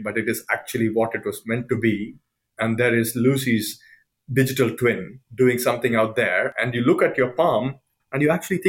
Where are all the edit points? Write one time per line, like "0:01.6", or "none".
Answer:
0:06.6